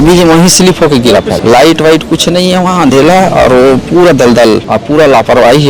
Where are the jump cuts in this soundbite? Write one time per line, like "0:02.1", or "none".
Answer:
0:01.4
0:04.7